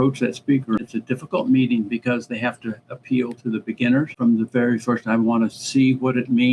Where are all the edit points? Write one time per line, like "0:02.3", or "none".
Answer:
0:00.9
0:04.1